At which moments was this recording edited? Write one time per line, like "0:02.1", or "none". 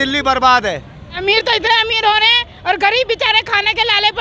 0:01.1